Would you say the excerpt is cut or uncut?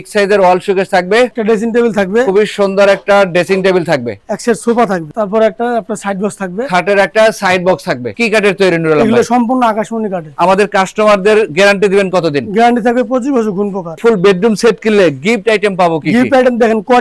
cut